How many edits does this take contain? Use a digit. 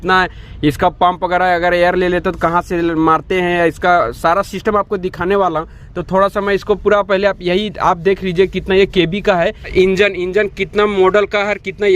1